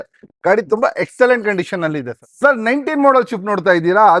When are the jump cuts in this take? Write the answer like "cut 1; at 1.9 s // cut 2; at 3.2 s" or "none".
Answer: cut 1; at 2.2 s

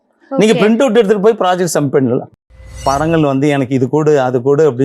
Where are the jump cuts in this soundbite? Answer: cut 1; at 2.6 s

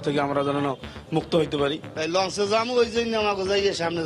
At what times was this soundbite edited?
cut 1; at 1.8 s

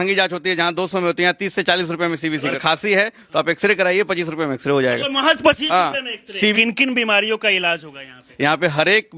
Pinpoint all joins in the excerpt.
cut 1; at 2.6 s // cut 2; at 6.1 s // cut 3; at 8.2 s

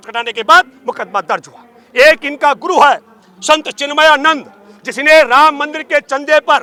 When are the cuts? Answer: none

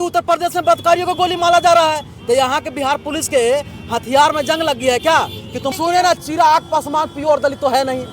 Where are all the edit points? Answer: cut 1; at 5.6 s

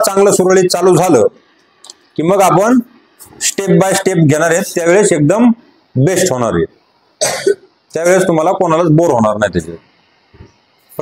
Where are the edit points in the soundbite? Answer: none

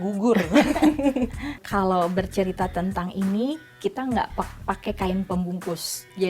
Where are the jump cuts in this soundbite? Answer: cut 1; at 1.6 s

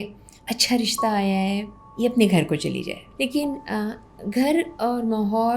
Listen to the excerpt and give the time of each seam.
cut 1; at 3.0 s

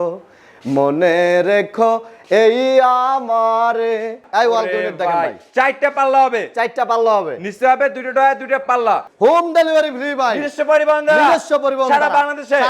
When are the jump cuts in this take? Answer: cut 1; at 4.2 s // cut 2; at 9.1 s

